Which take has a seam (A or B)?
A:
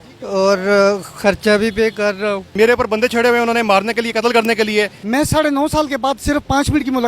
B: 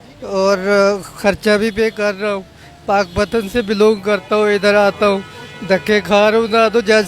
A